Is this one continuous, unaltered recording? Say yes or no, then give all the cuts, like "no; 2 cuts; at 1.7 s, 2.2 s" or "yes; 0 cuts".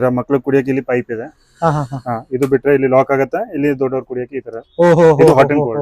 yes; 0 cuts